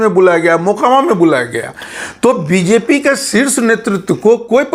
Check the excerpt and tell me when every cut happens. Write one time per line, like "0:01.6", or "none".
none